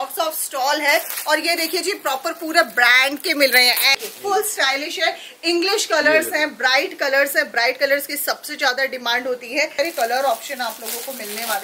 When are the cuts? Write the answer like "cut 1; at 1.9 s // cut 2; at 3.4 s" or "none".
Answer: cut 1; at 3.9 s // cut 2; at 9.8 s